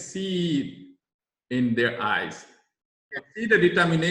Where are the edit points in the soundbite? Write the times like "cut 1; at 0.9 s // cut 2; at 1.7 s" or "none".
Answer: cut 1; at 3.2 s